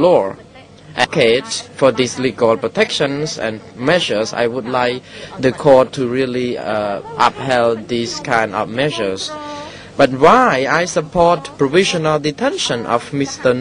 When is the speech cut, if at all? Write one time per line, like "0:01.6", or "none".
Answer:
0:06.7